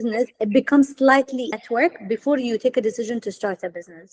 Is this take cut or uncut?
cut